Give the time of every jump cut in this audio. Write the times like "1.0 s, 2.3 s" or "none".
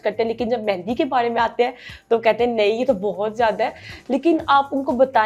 none